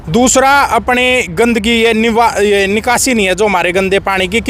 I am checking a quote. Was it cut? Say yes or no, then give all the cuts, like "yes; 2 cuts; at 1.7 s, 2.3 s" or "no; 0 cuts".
no; 0 cuts